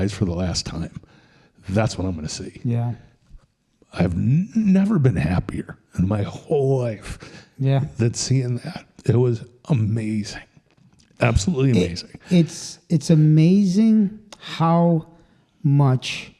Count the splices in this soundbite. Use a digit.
0